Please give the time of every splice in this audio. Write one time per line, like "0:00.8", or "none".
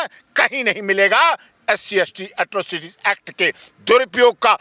none